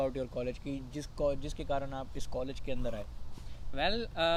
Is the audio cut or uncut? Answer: uncut